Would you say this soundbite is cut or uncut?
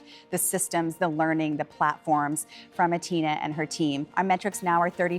cut